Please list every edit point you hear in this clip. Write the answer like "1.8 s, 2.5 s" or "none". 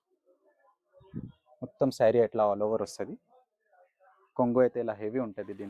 none